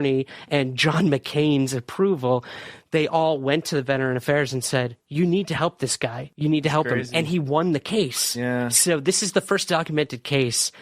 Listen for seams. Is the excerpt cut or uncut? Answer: cut